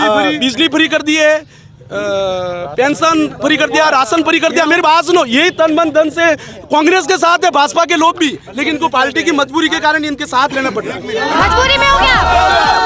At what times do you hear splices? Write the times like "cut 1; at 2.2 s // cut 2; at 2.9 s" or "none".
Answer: none